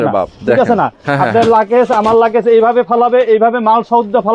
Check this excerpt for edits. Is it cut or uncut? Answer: uncut